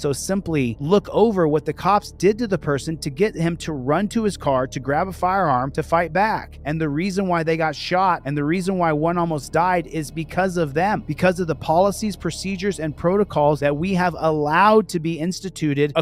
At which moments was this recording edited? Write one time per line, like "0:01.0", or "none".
none